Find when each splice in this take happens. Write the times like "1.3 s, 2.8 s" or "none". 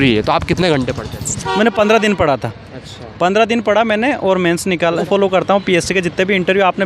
1.4 s, 5.1 s